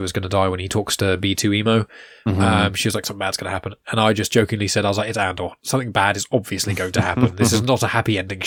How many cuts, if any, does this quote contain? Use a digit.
0